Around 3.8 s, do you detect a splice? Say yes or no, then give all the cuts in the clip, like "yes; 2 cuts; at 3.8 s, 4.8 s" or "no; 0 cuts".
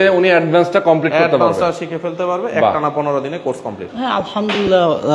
yes; 1 cut; at 3.8 s